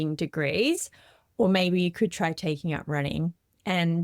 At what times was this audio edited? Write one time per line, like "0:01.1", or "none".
none